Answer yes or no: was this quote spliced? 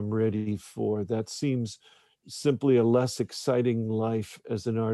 no